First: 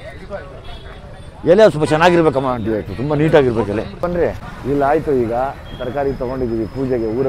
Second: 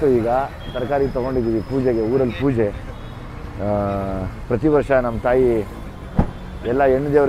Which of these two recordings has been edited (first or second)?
first